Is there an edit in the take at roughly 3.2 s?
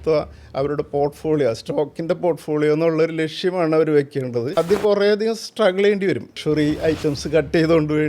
no; 2 cuts; at 4.5 s, 6.4 s

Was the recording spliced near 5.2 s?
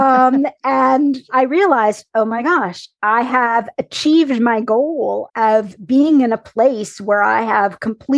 yes; 2 cuts; at 1.3 s, 5.2 s

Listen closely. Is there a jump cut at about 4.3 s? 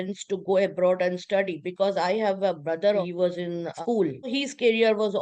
yes; 2 cuts; at 3.0 s, 4.3 s

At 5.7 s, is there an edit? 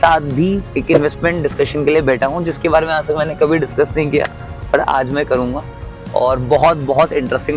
no; 0 cuts

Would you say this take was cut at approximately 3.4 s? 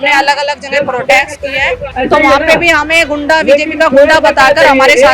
no; 1 cut; at 1.9 s

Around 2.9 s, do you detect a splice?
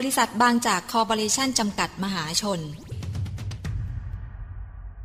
yes; 1 cut; at 2.9 s

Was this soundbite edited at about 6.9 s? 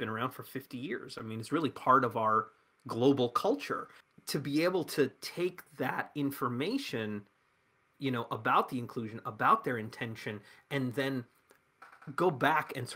no; 1 cut; at 3.7 s

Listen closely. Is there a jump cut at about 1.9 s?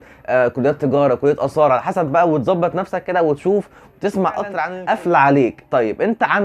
no; 1 cut; at 4.7 s

